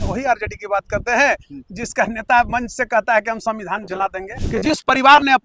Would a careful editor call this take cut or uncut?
cut